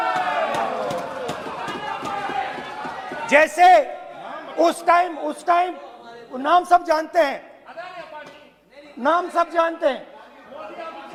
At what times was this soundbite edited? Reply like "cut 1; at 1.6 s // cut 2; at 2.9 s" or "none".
none